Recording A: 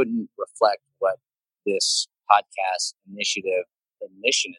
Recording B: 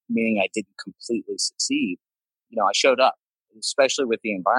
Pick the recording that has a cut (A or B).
B